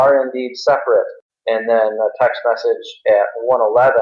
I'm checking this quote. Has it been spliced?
yes; 1 cut; at 1.2 s

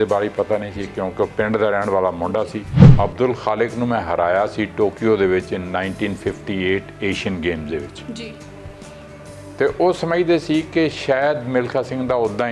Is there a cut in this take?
yes; 1 cut; at 2.8 s

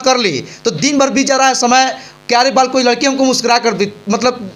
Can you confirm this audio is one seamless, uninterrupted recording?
yes; 0 cuts

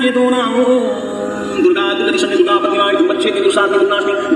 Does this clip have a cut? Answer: no; 0 cuts

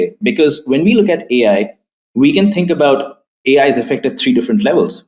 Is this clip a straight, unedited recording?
yes; 0 cuts

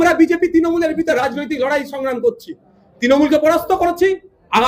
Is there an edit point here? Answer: no; 0 cuts

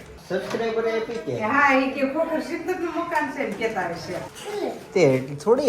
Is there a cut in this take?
yes; 1 cut; at 4.3 s

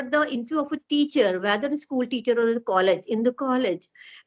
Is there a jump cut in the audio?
no; 0 cuts

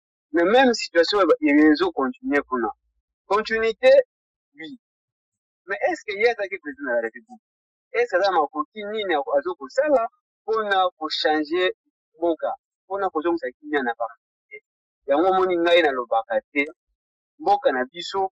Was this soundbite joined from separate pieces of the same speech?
no; 0 cuts

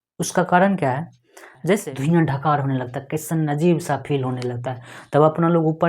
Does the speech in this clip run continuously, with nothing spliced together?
no; 1 cut; at 1.8 s

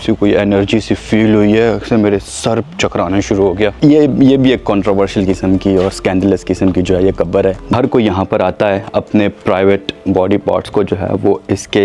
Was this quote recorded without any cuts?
no; 2 cuts; at 3.7 s, 7.7 s

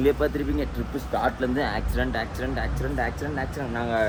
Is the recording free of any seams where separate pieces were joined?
yes; 0 cuts

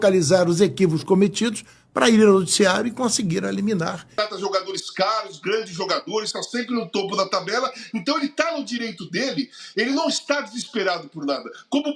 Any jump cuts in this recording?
yes; 1 cut; at 4.1 s

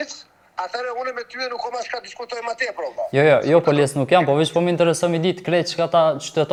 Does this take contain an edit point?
no; 0 cuts

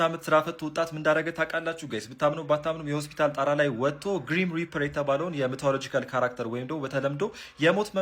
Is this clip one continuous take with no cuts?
yes; 0 cuts

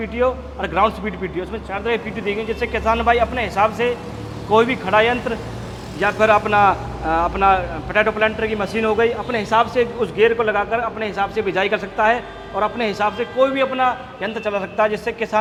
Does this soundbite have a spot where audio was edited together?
no; 0 cuts

